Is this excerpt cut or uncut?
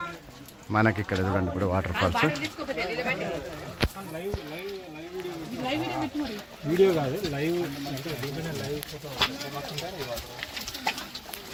uncut